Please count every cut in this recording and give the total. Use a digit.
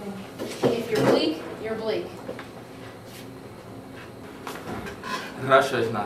1